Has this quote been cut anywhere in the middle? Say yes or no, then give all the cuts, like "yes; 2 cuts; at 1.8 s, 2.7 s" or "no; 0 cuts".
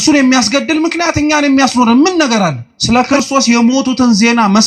yes; 1 cut; at 2.7 s